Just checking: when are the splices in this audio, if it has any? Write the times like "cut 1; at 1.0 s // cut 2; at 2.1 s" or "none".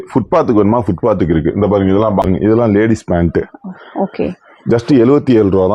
cut 1; at 2.2 s